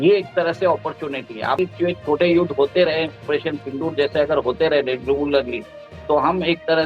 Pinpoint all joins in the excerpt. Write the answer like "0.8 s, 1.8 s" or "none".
1.6 s